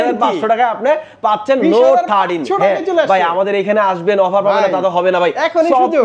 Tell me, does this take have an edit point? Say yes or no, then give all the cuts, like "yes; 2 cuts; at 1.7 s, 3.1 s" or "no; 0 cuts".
no; 0 cuts